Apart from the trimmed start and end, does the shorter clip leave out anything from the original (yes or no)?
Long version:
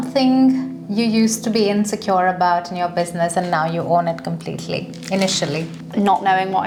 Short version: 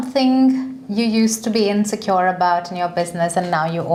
no